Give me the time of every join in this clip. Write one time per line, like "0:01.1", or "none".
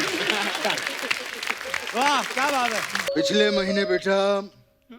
0:03.1